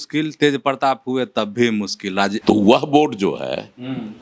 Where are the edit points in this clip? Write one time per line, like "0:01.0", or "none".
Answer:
0:02.4